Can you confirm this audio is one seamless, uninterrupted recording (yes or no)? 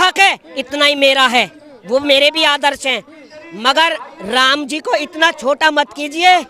yes